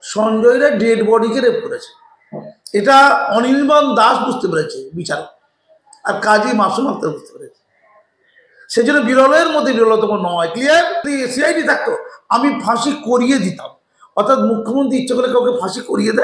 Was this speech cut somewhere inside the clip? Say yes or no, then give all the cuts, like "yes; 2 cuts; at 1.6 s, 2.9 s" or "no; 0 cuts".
yes; 1 cut; at 11.1 s